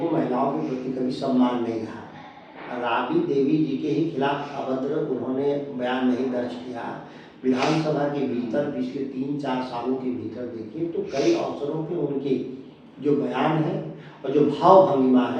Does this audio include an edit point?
no; 0 cuts

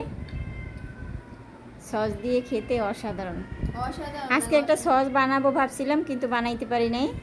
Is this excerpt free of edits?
yes; 0 cuts

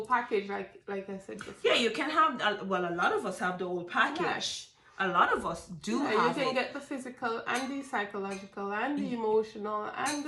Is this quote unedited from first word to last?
yes; 0 cuts

